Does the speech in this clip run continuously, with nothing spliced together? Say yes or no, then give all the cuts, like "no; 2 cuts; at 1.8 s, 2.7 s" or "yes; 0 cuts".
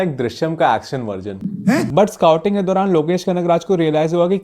no; 1 cut; at 1.9 s